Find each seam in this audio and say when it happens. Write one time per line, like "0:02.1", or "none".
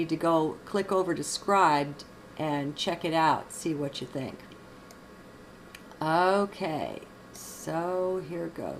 0:04.2